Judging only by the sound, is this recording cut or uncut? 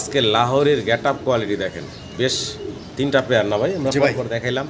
uncut